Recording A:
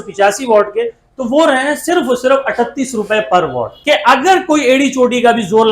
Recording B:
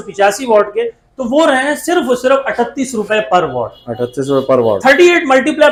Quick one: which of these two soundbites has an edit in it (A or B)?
A